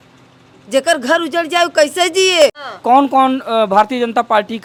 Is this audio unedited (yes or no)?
yes